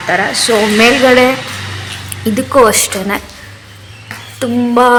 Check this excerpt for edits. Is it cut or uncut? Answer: uncut